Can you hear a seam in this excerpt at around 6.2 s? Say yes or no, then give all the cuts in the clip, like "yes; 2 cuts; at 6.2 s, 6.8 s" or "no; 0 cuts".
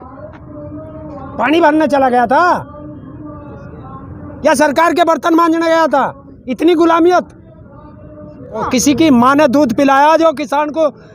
no; 1 cut; at 8.6 s